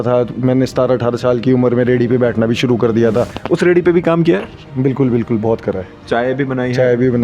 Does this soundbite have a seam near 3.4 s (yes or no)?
yes